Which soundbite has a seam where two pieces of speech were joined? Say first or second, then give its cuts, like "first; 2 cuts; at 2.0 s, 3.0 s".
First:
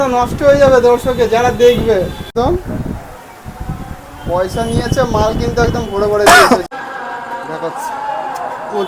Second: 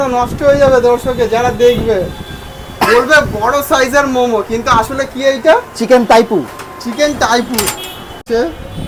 first; 2 cuts; at 2.3 s, 6.6 s